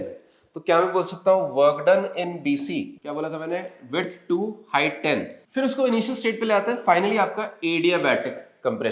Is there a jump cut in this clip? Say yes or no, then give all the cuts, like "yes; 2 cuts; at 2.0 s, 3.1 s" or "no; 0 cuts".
yes; 2 cuts; at 3.0 s, 5.4 s